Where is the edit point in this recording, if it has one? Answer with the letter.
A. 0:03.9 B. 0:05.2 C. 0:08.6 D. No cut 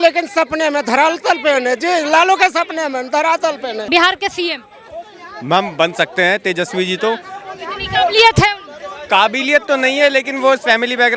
A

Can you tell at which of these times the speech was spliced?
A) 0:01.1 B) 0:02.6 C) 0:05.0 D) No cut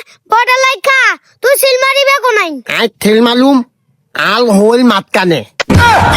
B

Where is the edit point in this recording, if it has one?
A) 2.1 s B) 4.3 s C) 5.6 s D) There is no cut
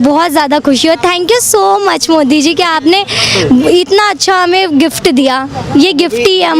D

